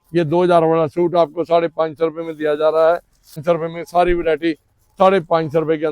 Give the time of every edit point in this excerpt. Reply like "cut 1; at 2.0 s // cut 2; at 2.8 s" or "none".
cut 1; at 3.4 s